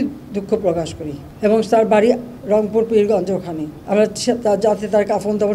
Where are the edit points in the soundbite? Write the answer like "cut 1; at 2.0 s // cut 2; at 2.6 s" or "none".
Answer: cut 1; at 2.3 s // cut 2; at 3.7 s